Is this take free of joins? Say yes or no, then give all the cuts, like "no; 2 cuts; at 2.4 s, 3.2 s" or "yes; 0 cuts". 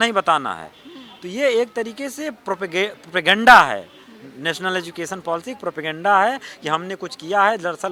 yes; 0 cuts